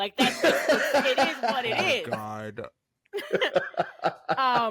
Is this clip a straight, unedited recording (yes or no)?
yes